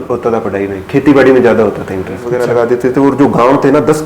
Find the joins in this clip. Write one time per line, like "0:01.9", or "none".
0:02.3